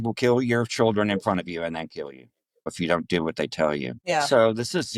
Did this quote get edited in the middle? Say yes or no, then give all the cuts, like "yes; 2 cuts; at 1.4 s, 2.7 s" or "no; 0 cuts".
no; 0 cuts